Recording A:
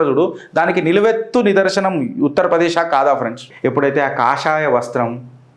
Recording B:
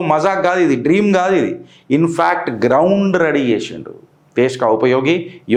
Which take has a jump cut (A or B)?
A